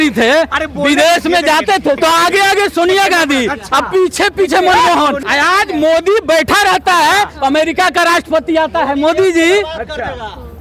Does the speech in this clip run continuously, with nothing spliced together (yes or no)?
no